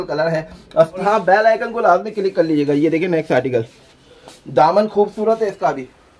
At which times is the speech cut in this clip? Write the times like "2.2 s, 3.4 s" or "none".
1.0 s